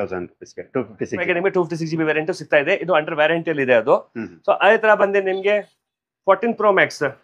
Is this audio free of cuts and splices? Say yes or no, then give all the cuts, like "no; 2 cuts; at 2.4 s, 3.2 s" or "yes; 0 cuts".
no; 1 cut; at 1.3 s